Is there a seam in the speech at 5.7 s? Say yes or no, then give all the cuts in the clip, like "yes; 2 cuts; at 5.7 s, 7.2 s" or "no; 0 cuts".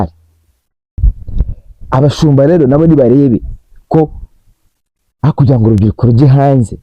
no; 1 cut; at 1.0 s